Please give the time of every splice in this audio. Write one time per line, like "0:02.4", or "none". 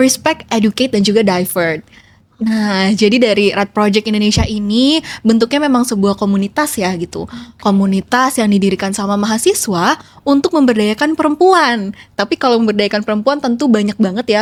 none